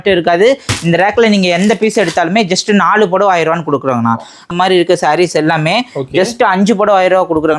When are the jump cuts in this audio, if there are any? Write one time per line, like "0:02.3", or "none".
0:04.5